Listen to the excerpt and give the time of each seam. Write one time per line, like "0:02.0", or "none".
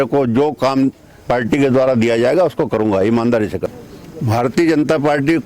0:03.7